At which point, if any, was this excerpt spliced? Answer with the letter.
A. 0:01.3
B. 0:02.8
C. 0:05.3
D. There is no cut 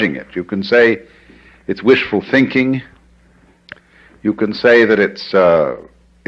B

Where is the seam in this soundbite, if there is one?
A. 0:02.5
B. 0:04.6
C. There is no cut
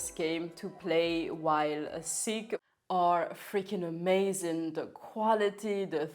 A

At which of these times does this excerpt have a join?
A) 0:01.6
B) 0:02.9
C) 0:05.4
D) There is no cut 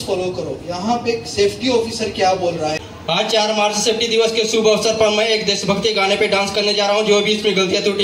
B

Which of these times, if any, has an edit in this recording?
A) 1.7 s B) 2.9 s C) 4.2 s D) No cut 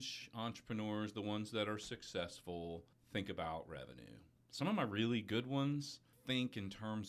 B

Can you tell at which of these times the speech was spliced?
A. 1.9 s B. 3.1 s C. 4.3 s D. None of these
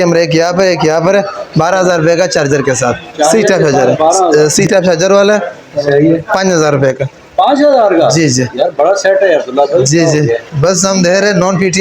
C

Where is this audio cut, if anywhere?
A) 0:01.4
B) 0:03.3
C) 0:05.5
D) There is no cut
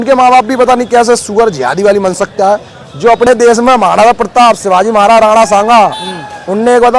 B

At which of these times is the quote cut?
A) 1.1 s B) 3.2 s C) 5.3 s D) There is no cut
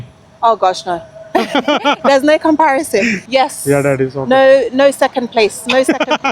B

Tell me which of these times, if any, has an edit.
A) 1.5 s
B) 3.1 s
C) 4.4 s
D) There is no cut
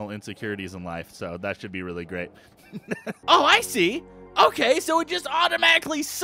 B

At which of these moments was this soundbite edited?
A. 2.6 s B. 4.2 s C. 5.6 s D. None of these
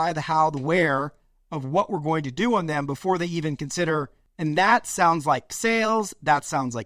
B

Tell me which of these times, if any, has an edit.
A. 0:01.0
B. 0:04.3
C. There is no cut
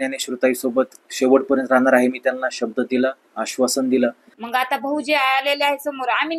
B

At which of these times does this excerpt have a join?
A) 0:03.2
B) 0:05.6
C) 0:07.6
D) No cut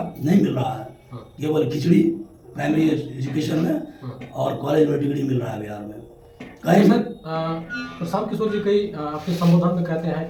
D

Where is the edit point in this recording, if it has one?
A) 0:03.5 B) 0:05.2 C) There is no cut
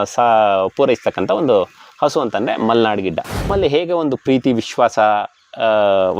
A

